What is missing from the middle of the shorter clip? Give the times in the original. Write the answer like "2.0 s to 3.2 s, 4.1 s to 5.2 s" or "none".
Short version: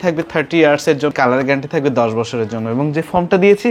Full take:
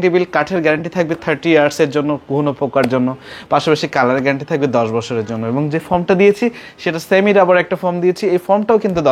2.0 s to 3.9 s